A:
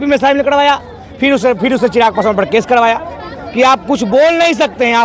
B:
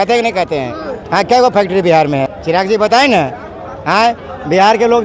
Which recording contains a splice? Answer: B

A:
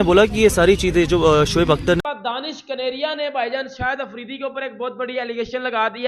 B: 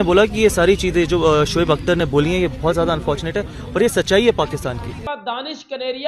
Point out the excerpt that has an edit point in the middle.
A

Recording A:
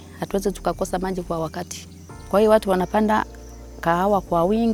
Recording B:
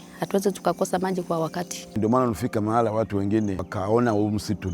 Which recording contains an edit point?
B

